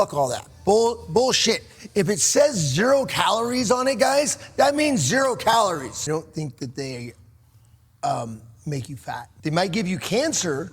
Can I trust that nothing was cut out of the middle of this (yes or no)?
no